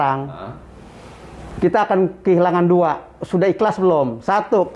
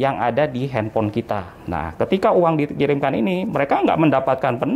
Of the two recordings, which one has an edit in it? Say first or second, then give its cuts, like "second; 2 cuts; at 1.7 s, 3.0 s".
second; 1 cut; at 1.5 s